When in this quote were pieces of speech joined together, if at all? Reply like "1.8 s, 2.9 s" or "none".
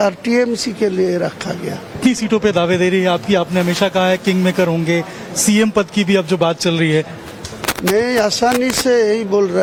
none